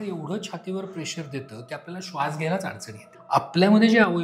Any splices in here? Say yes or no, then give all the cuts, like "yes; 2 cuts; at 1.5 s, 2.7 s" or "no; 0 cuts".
yes; 1 cut; at 3.1 s